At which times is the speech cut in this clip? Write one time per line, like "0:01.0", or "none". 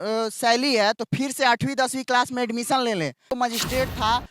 0:03.3